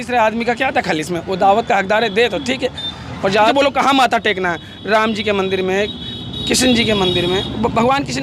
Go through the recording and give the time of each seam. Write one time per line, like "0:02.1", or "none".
0:03.5